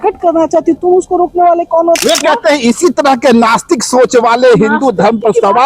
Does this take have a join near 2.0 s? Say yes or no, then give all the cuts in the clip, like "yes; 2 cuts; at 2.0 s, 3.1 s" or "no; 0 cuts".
yes; 1 cut; at 2.0 s